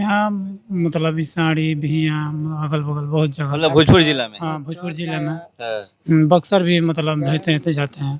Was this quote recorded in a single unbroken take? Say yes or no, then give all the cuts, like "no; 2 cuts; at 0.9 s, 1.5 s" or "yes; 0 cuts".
yes; 0 cuts